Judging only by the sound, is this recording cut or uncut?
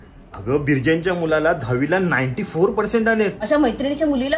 cut